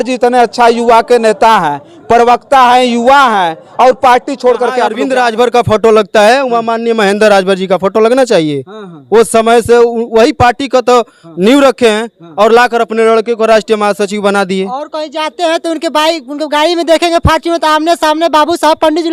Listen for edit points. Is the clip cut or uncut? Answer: cut